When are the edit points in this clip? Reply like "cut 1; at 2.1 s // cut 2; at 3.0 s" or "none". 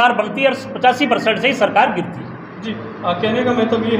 none